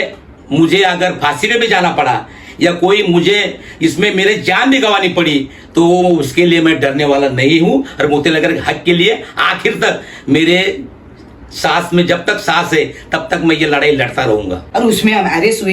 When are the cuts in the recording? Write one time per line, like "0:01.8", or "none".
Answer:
0:14.6